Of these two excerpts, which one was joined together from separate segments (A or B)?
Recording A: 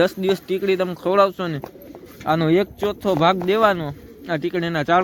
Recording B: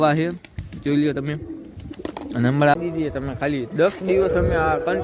B